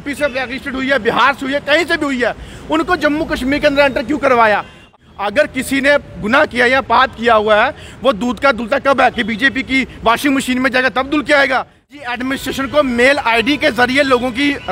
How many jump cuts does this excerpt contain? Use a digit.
2